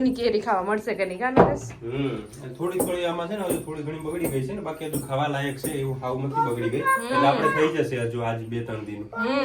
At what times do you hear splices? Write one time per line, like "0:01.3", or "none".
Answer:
none